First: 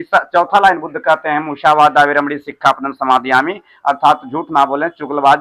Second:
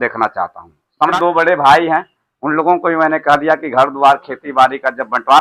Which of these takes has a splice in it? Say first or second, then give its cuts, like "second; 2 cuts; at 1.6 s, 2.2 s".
second; 1 cut; at 1.1 s